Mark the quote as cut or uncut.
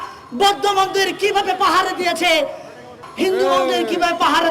cut